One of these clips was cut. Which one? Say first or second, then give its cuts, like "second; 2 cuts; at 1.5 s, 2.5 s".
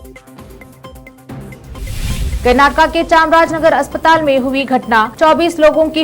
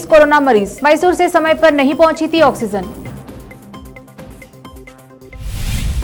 first; 1 cut; at 1.8 s